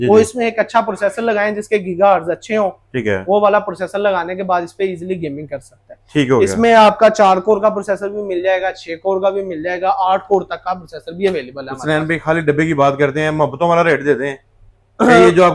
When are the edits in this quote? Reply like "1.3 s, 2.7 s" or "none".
none